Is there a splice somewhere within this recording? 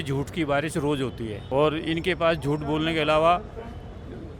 yes; 1 cut; at 1.4 s

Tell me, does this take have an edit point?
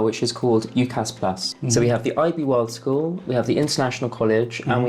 yes; 1 cut; at 1.5 s

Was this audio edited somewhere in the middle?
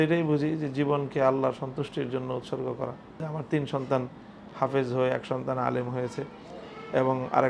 yes; 1 cut; at 3.2 s

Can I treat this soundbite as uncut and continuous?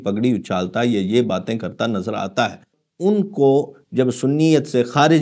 no; 1 cut; at 2.8 s

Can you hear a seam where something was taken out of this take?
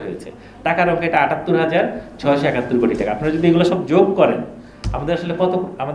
no; 0 cuts

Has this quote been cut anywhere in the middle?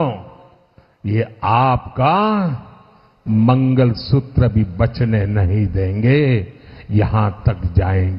no; 0 cuts

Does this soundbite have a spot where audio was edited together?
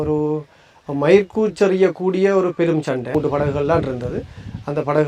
yes; 1 cut; at 3.1 s

